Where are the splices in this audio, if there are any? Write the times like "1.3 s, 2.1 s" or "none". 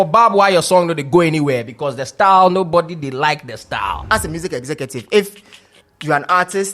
4.0 s